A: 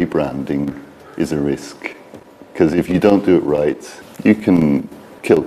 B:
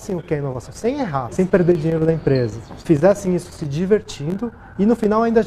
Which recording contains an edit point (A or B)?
B